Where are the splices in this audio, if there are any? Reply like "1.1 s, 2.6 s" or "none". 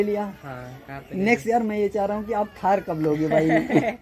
none